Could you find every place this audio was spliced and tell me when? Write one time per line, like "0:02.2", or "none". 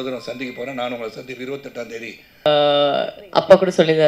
0:02.5